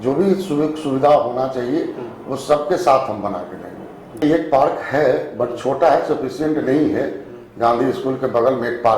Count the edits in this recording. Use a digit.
1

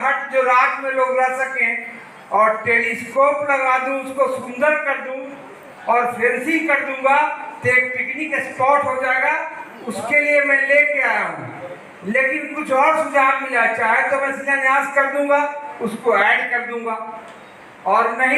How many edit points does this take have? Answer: 0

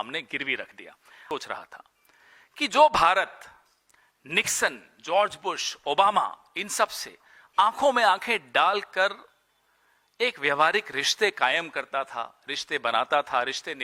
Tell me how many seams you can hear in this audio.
1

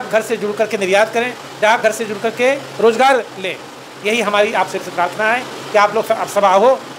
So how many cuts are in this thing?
0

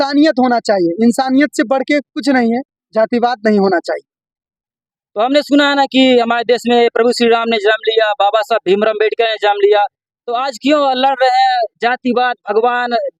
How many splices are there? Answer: 0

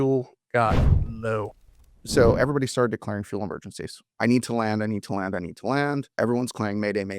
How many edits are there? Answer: 3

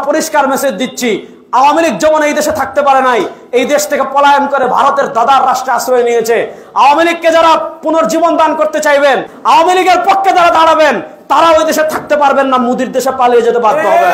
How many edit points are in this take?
1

